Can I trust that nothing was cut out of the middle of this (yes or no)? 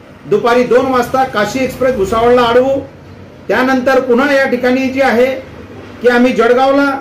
yes